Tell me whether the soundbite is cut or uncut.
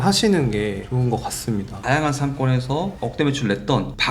cut